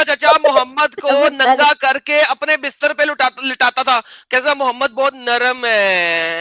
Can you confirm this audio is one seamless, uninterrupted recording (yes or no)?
yes